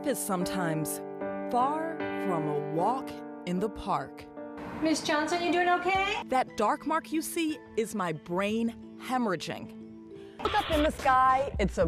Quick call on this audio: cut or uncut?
cut